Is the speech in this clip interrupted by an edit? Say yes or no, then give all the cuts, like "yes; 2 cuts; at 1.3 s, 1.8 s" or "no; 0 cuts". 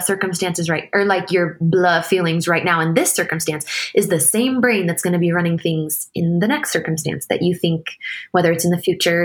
no; 0 cuts